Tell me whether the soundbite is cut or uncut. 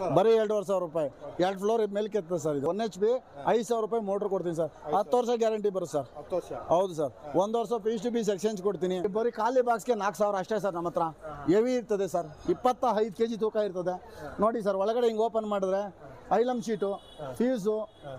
cut